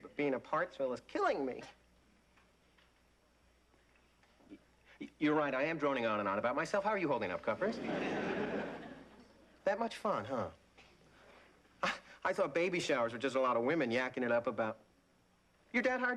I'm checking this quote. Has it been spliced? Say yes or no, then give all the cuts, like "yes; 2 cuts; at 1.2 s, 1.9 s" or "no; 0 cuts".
no; 0 cuts